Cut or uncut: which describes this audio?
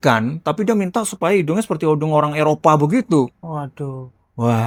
uncut